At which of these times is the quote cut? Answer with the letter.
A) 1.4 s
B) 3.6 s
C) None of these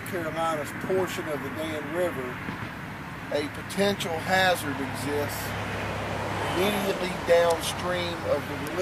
A